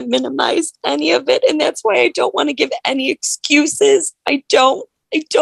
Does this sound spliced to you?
no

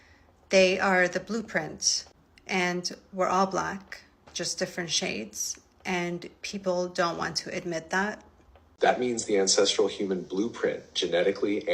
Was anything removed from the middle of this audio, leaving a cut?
yes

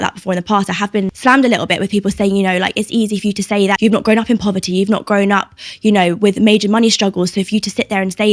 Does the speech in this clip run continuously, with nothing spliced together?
no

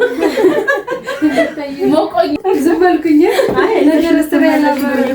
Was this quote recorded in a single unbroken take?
no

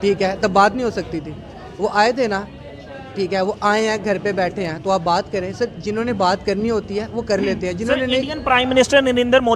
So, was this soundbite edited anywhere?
no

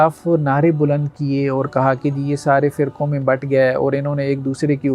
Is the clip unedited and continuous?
yes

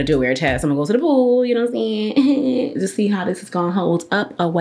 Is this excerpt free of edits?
yes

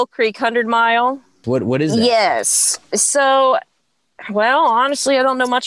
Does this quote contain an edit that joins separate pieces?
yes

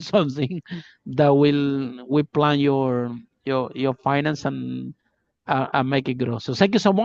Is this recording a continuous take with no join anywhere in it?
yes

